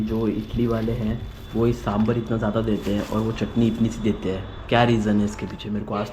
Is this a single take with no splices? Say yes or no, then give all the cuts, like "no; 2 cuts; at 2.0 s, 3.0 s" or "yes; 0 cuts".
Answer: yes; 0 cuts